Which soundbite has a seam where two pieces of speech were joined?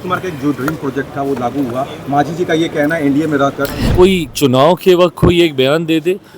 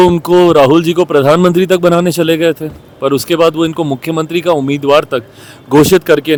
first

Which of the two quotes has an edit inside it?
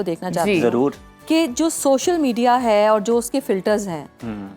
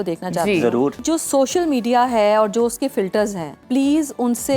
second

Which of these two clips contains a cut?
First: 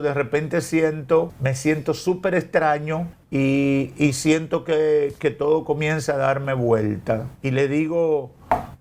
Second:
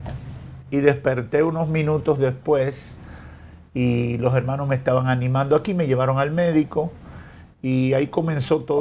first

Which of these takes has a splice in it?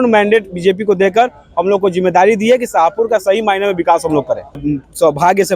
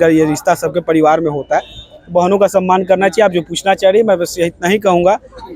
first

